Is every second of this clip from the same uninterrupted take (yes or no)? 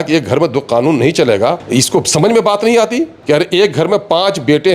no